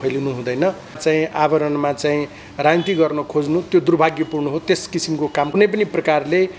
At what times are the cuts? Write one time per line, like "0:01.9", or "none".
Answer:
0:01.0
0:05.5